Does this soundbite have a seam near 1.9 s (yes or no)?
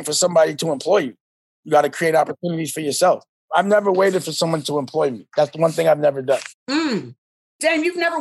no